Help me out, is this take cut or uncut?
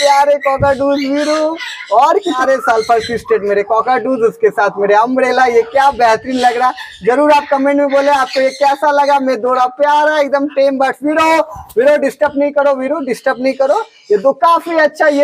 uncut